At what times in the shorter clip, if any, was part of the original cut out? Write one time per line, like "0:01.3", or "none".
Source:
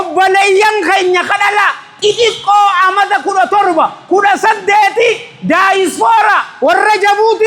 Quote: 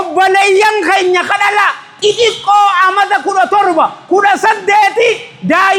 none